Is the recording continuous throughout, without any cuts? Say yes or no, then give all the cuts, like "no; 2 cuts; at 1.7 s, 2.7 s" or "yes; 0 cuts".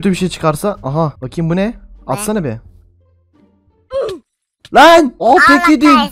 no; 1 cut; at 1.2 s